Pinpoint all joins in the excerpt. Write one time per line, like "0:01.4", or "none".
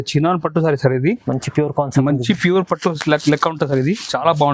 none